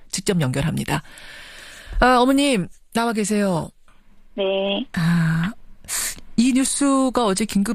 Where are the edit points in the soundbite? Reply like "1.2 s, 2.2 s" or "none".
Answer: 5.6 s